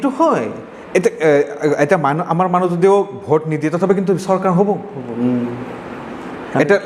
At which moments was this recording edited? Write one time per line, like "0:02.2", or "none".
none